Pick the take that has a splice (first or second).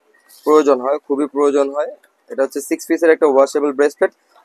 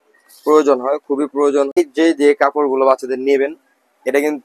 second